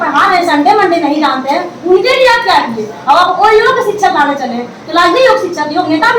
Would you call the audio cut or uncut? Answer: uncut